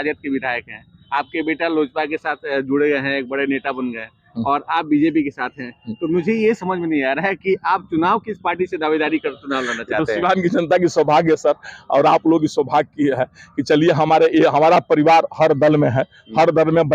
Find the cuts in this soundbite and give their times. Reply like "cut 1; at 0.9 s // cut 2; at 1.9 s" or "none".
none